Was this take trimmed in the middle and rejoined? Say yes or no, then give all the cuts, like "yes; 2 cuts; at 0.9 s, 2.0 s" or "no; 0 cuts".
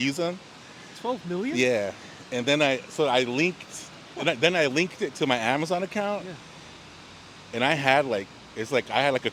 no; 0 cuts